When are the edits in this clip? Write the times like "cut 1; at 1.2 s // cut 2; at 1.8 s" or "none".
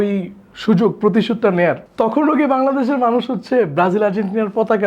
cut 1; at 1.9 s